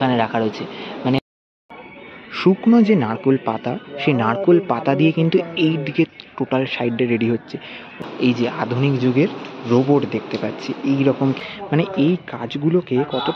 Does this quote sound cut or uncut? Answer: cut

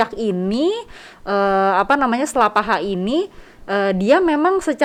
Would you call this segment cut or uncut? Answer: uncut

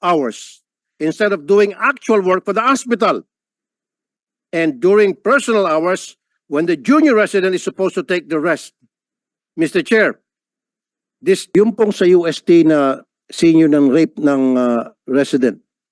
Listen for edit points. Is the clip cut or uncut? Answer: cut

